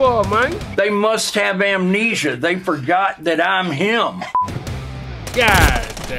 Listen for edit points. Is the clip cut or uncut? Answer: uncut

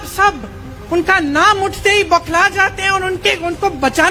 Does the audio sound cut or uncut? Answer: uncut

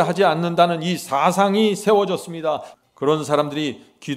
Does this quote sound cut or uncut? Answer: cut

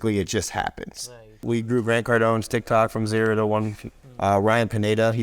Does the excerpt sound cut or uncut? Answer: cut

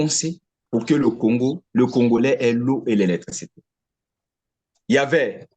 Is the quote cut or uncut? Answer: cut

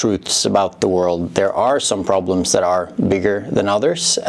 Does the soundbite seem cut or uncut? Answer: uncut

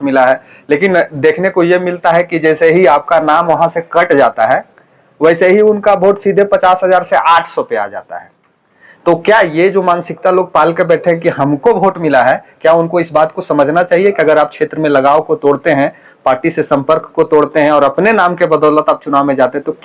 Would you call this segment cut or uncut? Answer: uncut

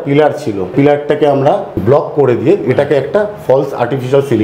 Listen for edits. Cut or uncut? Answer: cut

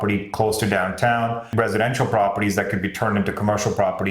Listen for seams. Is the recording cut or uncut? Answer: cut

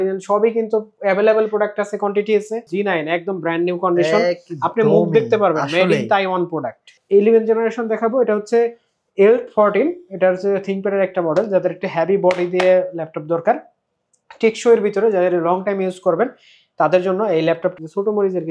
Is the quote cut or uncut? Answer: cut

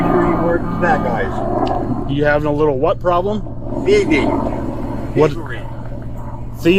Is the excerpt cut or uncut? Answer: uncut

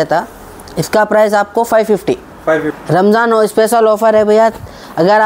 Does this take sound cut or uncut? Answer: cut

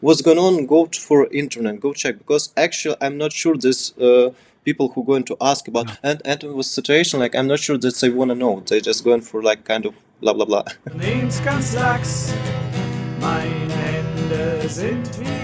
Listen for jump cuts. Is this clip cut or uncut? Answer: cut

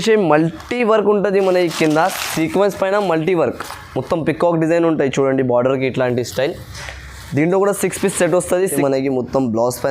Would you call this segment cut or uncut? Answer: cut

